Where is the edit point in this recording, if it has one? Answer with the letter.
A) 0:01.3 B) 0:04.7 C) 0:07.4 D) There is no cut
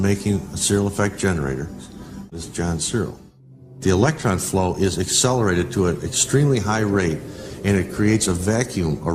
B